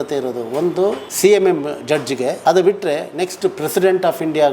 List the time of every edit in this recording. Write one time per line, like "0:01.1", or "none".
0:02.4